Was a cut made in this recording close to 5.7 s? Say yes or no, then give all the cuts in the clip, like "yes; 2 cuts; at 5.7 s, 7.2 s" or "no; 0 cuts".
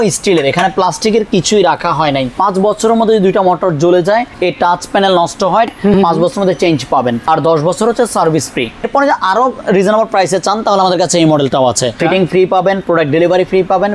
yes; 6 cuts; at 2.3 s, 4.3 s, 5.7 s, 7.2 s, 8.9 s, 12.0 s